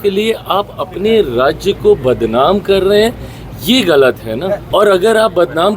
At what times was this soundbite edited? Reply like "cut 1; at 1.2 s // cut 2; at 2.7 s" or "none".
cut 1; at 4.6 s